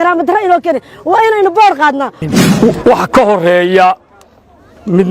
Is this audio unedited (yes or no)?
no